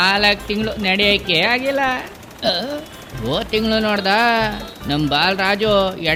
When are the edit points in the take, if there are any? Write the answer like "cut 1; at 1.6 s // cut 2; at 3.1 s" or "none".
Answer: none